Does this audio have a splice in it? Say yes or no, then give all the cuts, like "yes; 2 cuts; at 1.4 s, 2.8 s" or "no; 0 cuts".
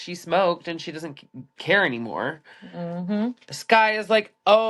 no; 0 cuts